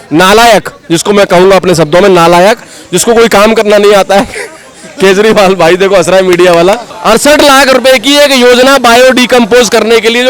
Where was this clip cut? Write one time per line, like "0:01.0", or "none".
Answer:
0:06.9

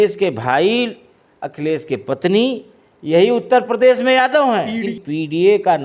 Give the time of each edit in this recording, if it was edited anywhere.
0:04.9

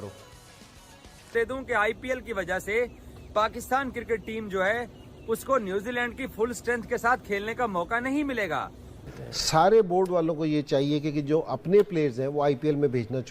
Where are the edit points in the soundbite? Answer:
0:01.3
0:09.0

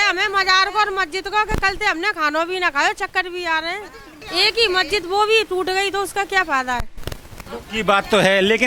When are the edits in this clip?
0:04.1

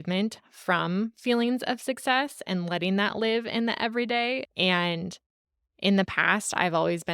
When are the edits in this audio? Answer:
0:04.4

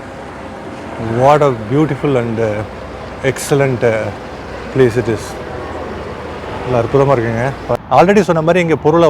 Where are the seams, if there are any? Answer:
0:07.7

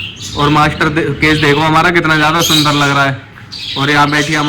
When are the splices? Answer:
none

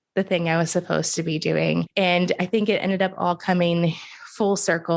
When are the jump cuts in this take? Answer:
0:01.9

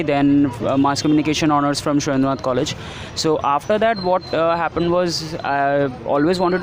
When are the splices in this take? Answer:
none

